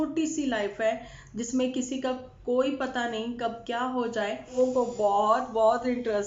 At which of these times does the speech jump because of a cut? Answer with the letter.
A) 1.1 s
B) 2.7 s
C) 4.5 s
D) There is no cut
C